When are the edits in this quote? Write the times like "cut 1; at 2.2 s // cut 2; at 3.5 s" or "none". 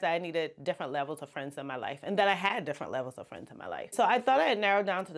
cut 1; at 3.9 s